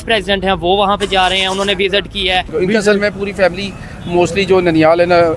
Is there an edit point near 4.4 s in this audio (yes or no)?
no